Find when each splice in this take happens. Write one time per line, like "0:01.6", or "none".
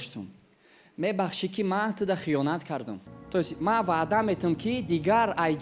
0:03.0